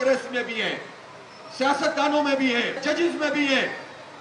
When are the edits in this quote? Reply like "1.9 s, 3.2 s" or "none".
2.8 s